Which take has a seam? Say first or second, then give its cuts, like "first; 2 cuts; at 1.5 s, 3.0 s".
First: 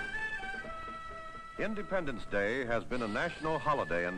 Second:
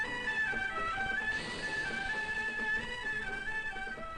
second; 1 cut; at 1.2 s